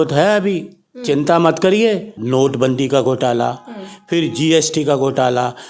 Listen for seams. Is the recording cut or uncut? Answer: cut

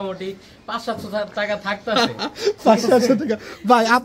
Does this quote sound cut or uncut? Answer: uncut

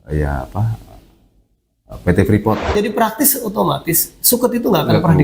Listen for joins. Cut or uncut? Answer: cut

